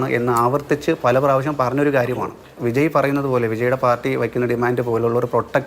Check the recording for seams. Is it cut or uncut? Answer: cut